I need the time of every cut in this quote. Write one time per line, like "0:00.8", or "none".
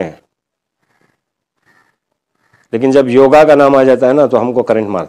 none